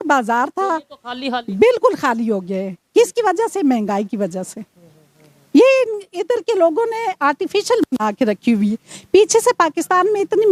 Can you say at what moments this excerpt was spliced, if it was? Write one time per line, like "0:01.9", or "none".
none